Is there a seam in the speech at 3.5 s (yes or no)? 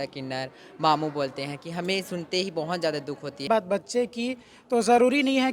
yes